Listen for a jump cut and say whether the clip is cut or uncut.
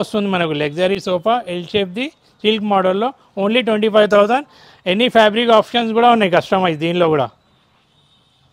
uncut